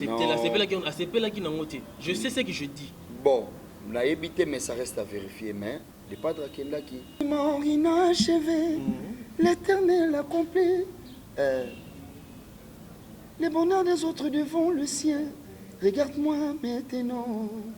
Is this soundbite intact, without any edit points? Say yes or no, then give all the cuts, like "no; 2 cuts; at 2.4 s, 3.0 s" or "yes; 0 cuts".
no; 1 cut; at 7.2 s